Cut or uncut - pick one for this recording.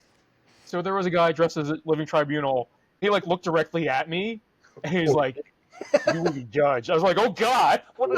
cut